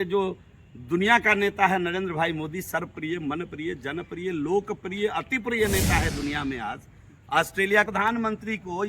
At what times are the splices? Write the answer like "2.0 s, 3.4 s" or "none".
7.9 s